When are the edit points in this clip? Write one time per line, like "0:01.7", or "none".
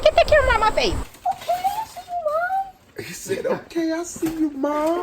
0:01.1